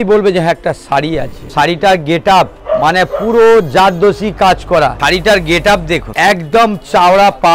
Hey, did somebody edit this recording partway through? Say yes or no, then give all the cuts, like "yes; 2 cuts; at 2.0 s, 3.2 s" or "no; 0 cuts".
yes; 4 cuts; at 1.4 s, 2.6 s, 5.0 s, 6.1 s